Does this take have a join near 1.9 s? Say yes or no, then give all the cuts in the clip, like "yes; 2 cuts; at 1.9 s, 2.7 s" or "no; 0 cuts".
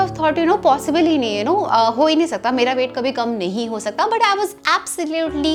no; 0 cuts